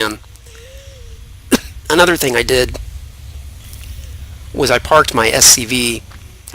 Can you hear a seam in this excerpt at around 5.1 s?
yes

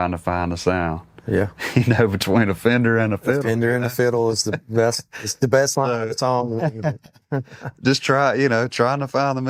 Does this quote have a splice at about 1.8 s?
no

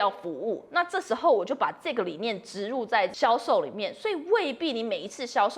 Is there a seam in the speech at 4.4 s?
no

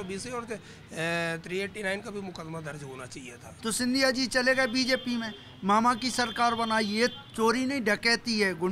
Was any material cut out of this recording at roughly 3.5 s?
yes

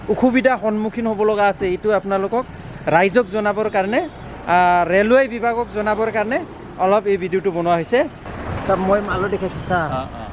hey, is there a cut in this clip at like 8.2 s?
yes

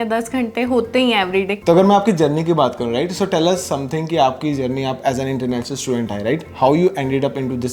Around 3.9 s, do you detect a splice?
no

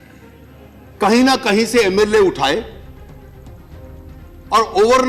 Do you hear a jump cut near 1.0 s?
yes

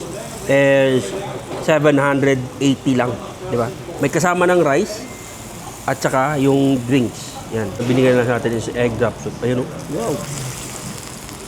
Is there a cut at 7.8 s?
yes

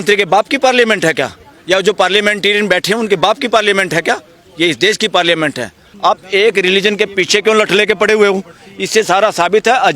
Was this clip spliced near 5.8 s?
yes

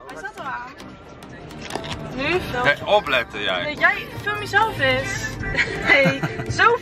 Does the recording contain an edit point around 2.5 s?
yes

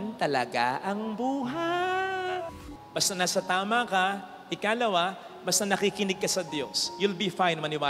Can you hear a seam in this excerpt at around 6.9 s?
no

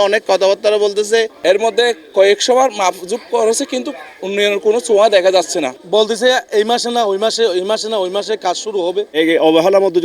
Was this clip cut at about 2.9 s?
no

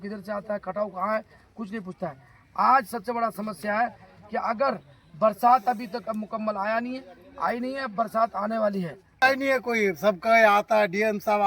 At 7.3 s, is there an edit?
no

